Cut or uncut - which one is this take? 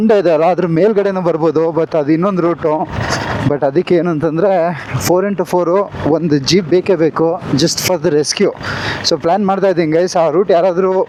uncut